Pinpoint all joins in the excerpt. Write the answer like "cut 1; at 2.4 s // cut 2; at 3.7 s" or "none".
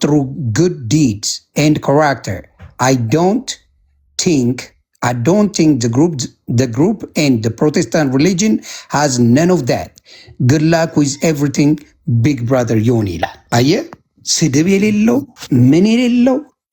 cut 1; at 13.4 s // cut 2; at 15.4 s